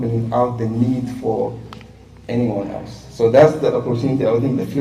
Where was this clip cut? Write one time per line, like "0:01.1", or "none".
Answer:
none